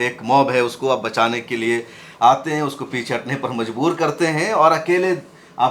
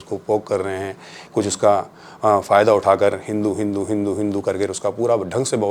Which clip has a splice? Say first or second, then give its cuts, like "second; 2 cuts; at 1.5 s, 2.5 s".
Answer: second; 1 cut; at 1.1 s